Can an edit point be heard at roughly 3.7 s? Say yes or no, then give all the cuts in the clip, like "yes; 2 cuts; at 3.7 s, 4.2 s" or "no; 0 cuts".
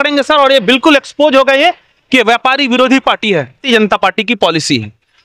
yes; 1 cut; at 3.7 s